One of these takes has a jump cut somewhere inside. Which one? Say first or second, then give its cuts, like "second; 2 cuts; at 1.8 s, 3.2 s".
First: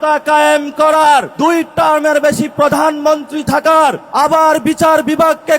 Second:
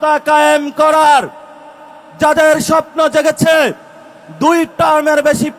first; 2 cuts; at 1.3 s, 4.0 s